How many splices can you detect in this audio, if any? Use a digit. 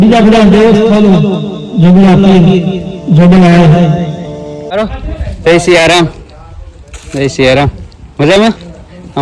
1